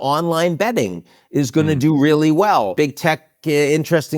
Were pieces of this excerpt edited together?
yes; 1 cut; at 2.7 s

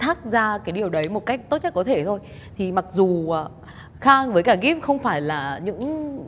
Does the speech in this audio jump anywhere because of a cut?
no; 0 cuts

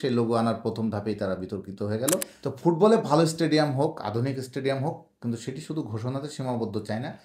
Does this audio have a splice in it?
yes; 1 cut; at 2.3 s

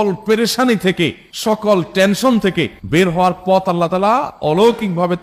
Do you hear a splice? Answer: no; 0 cuts

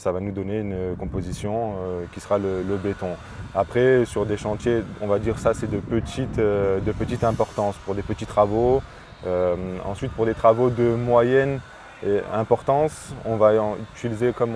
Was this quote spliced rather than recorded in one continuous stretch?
no; 0 cuts

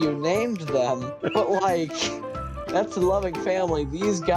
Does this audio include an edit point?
yes; 1 cut; at 1.1 s

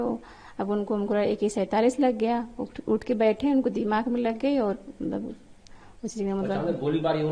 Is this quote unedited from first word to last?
yes; 0 cuts

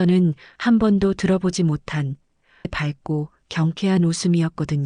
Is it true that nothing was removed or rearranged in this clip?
no; 1 cut; at 2.7 s

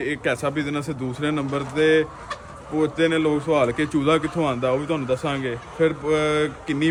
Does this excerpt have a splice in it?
no; 0 cuts

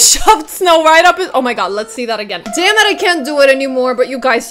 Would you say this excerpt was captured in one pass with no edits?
yes; 0 cuts

